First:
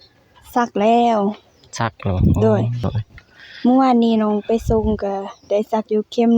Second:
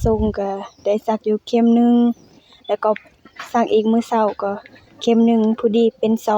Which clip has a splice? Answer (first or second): first